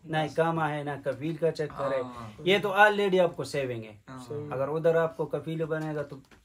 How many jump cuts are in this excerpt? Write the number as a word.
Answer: zero